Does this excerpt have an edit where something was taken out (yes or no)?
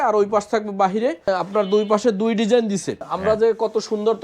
yes